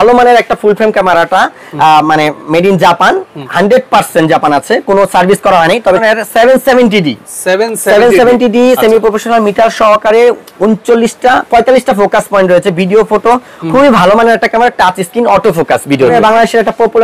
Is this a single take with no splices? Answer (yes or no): no